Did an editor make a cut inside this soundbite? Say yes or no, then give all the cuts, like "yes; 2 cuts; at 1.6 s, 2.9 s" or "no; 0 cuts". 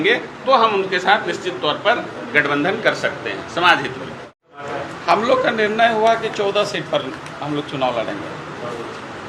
yes; 1 cut; at 4.6 s